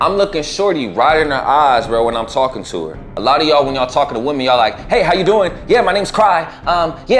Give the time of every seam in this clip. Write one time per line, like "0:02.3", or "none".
0:03.0